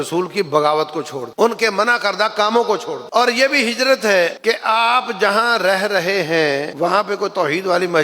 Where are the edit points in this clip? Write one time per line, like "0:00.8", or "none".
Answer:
0:01.2
0:03.0
0:04.4
0:06.7